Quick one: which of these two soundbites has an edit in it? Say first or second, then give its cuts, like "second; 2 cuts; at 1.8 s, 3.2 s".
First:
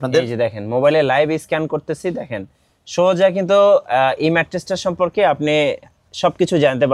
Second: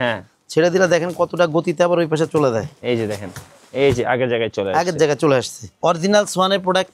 second; 1 cut; at 5.6 s